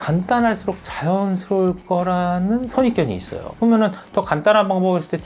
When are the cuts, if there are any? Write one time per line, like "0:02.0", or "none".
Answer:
0:03.5